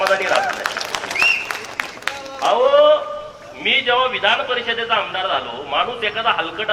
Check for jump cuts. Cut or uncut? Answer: uncut